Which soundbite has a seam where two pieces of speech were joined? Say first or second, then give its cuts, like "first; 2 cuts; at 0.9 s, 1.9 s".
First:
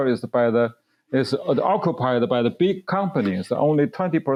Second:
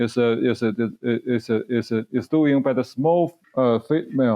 second; 1 cut; at 3.4 s